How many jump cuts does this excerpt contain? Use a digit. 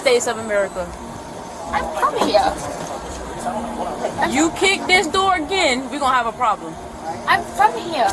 0